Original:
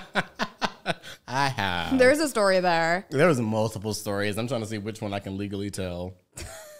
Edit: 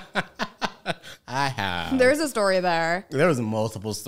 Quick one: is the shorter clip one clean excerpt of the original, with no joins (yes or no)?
yes